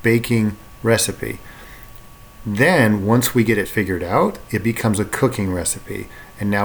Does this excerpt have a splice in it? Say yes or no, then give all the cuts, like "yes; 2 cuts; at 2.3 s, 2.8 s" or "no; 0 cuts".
no; 0 cuts